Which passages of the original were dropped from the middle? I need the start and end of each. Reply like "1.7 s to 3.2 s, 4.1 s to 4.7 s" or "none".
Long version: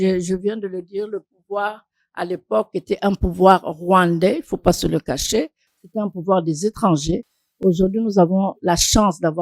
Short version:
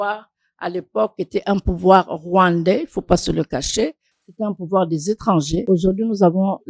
7.2 s to 7.6 s

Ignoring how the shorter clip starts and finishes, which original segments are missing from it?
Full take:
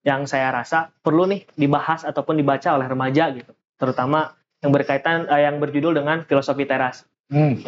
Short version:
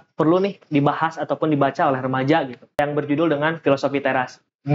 3.7 s to 5.4 s

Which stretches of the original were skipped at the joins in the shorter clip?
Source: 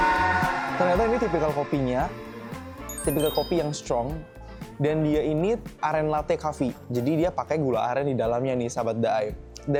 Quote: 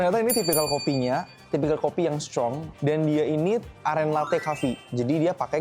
2.2 s to 2.9 s, 4.2 s to 4.6 s

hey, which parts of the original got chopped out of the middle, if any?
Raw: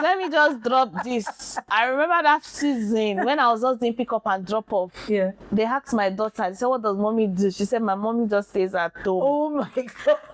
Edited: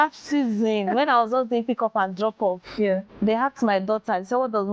none

